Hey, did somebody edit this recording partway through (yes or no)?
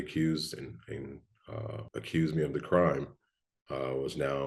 yes